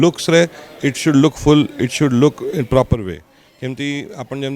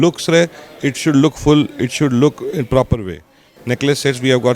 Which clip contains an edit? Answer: second; 1 cut; at 3.5 s

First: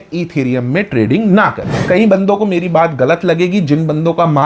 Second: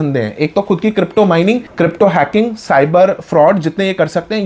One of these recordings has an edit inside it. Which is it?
first; 1 cut; at 1.7 s

